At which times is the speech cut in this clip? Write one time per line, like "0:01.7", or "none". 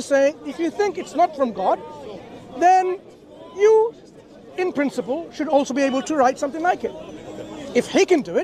none